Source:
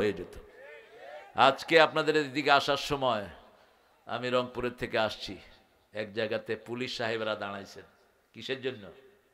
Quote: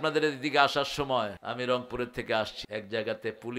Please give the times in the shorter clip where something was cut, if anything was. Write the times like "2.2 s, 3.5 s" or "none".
1.4 s, 2.6 s

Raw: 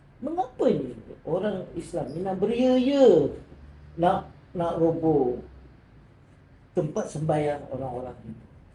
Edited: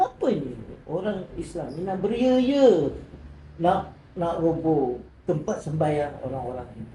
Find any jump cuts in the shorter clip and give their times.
5.1 s

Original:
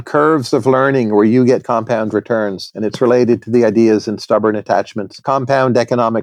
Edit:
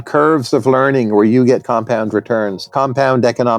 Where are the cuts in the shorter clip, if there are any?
2.6 s

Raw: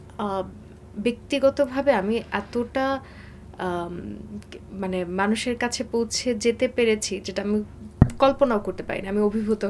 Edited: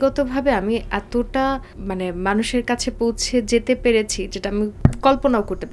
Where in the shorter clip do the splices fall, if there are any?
1.7 s, 4.7 s

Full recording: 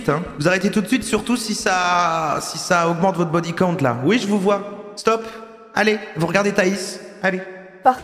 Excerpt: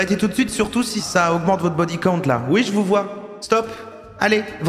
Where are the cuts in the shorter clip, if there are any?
1.0 s

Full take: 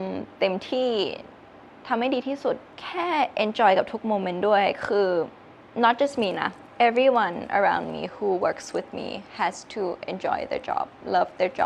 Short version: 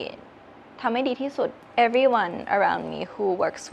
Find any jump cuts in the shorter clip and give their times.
1.6 s

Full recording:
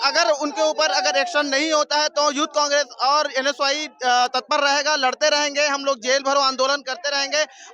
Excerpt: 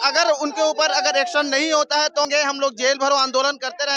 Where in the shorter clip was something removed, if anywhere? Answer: 2.3 s

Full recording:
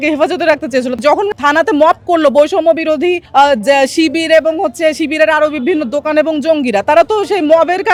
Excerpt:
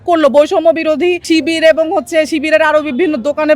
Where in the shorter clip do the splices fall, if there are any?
1.2 s

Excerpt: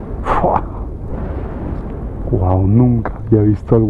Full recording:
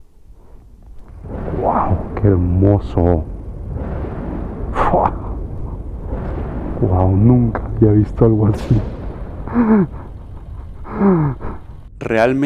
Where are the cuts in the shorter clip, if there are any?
none

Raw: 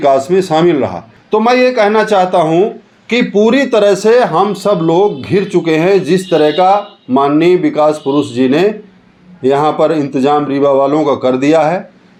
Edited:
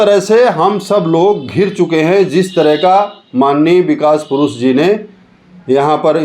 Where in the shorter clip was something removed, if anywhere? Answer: none

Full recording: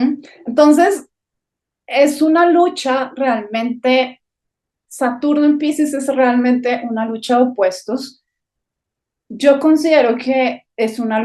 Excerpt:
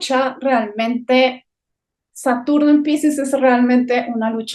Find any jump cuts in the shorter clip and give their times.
none

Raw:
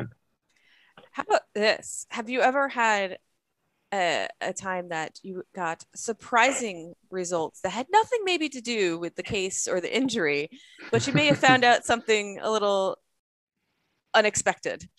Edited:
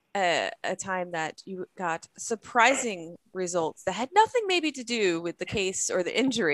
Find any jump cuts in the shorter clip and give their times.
none

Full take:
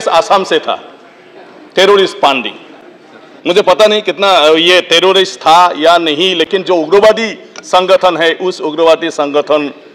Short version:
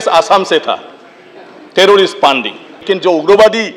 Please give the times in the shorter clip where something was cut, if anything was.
2.9 s

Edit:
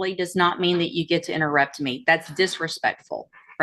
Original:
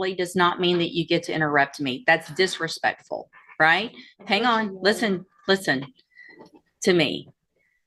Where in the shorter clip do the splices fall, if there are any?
none

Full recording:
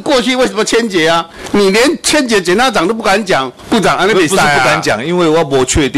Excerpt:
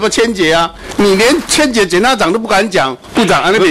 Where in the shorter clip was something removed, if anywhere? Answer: none

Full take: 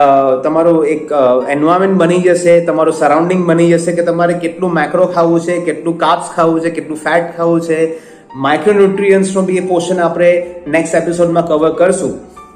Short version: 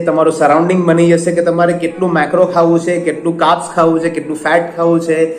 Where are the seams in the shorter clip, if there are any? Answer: none

